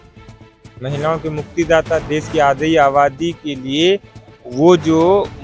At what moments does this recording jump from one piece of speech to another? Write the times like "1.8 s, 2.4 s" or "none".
none